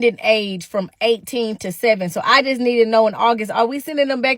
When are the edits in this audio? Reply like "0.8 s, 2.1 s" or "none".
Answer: none